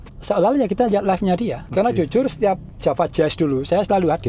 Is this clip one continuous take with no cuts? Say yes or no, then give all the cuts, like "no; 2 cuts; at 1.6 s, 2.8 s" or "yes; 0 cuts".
no; 2 cuts; at 1.6 s, 2.7 s